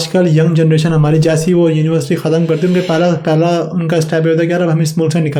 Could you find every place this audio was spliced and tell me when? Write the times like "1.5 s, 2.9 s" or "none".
none